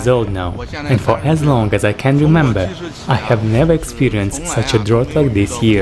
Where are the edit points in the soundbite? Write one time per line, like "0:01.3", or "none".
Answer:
none